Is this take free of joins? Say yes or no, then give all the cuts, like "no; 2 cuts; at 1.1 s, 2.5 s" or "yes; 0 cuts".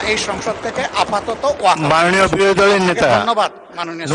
yes; 0 cuts